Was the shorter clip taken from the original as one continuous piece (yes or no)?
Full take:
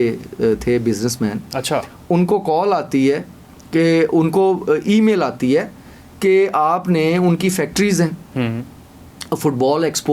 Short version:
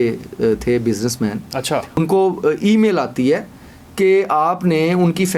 no